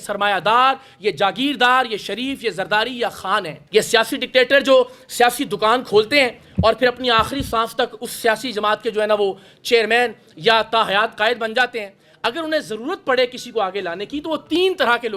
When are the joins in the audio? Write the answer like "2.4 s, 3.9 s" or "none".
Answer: 3.6 s